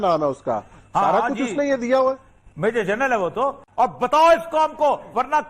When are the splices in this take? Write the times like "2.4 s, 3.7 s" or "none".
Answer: 3.6 s